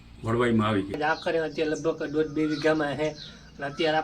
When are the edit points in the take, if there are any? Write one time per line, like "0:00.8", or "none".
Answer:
0:01.0